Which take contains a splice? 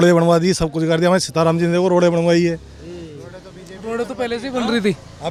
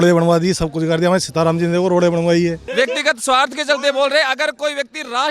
second; 1 cut; at 2.6 s

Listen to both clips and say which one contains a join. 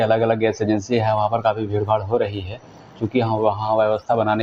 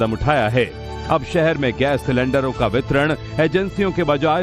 first; 1 cut; at 2.1 s

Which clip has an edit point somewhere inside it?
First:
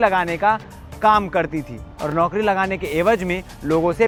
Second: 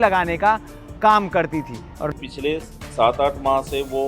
second; 1 cut; at 2.1 s

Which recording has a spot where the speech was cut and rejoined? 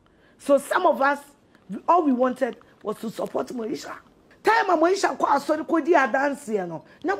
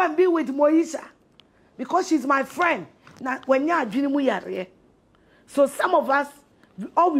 first; 1 cut; at 4.3 s

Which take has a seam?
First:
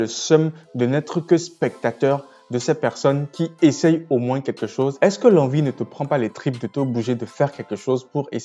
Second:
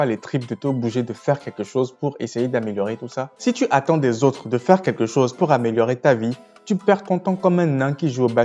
second; 1 cut; at 3.3 s

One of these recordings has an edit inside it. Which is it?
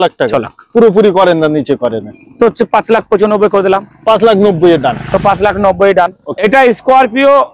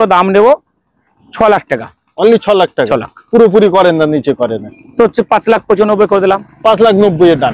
first; 1 cut; at 6.4 s

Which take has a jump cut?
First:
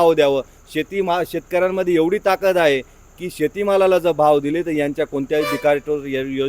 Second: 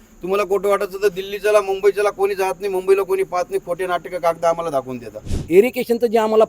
second; 1 cut; at 5.3 s

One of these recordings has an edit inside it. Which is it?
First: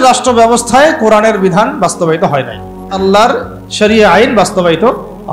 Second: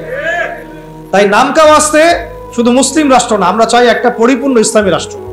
first; 1 cut; at 3.0 s

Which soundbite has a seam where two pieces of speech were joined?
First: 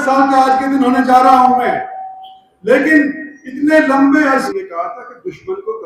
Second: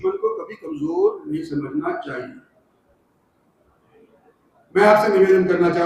first; 1 cut; at 4.5 s

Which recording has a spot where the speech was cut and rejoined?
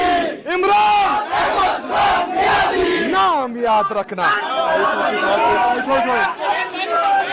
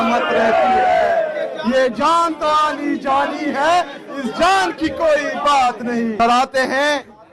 second; 1 cut; at 6.1 s

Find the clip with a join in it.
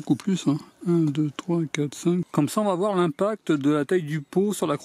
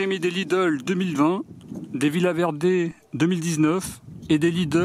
first; 1 cut; at 2.3 s

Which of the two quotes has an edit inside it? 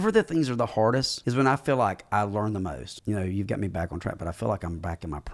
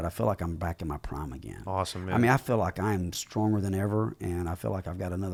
first; 2 cuts; at 1.2 s, 2.9 s

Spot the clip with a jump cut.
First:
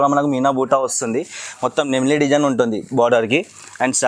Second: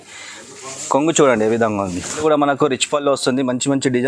second; 1 cut; at 2.2 s

